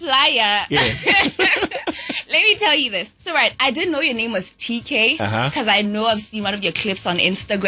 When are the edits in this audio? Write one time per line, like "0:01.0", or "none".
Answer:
0:03.1